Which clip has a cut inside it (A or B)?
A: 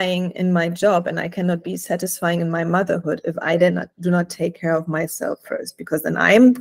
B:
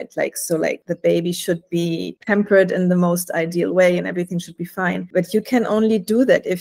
B